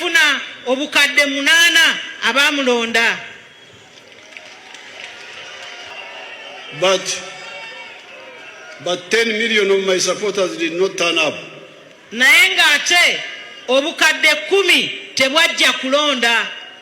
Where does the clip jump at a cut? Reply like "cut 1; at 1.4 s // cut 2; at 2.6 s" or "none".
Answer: cut 1; at 5.9 s